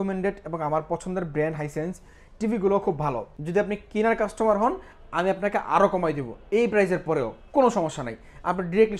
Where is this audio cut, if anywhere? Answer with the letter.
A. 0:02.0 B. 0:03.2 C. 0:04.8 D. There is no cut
B